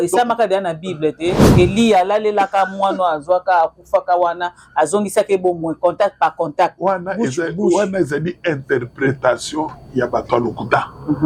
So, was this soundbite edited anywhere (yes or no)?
no